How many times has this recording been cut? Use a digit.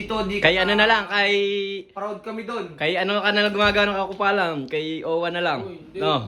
0